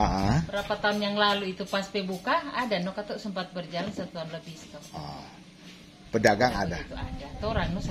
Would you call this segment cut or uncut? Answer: uncut